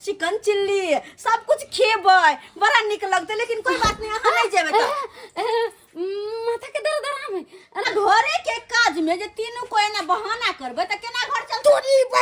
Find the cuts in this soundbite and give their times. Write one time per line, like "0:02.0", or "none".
0:07.9